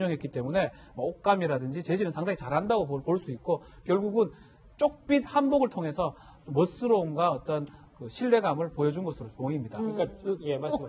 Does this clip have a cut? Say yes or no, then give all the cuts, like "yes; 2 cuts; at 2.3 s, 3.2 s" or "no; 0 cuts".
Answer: no; 0 cuts